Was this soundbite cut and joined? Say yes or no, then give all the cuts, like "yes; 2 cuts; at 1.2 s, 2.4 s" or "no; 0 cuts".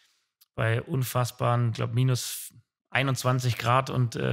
no; 0 cuts